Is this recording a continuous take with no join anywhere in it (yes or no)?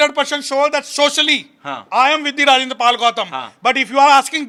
yes